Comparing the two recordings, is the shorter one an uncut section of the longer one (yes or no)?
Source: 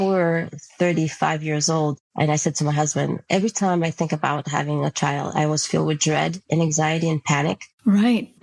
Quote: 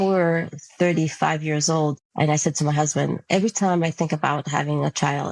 yes